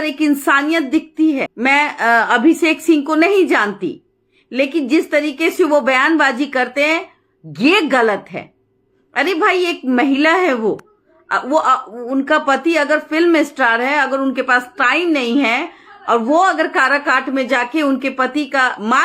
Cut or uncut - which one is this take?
uncut